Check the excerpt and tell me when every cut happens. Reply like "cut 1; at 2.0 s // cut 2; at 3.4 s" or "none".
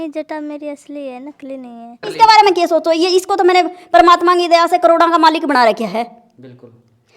cut 1; at 2.1 s